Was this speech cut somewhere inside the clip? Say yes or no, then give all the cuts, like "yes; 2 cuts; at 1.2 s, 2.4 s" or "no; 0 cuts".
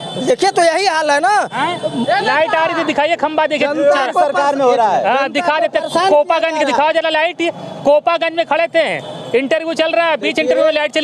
no; 0 cuts